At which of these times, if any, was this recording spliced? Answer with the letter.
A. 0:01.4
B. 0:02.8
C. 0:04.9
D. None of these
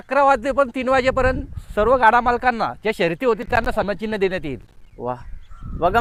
D